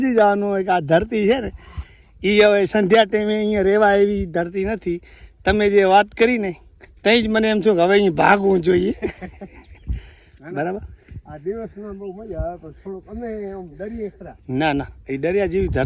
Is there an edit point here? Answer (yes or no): no